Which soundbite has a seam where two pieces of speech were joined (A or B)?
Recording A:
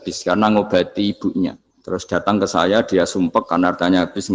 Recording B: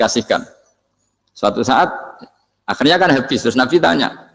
A